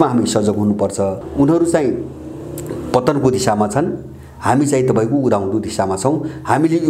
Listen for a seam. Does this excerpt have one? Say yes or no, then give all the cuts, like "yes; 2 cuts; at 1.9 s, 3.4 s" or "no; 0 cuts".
yes; 1 cut; at 1.2 s